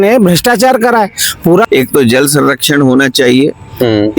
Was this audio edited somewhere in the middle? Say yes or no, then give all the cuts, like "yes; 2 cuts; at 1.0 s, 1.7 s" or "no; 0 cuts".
yes; 1 cut; at 1.7 s